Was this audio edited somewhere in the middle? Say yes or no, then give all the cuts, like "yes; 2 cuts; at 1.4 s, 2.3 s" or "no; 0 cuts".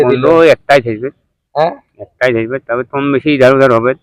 no; 0 cuts